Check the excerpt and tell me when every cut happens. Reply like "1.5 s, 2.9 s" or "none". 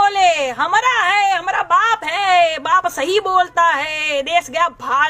none